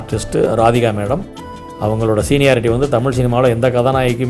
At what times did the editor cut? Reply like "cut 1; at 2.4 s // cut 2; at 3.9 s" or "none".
none